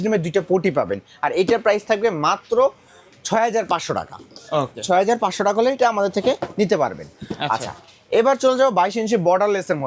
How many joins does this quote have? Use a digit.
0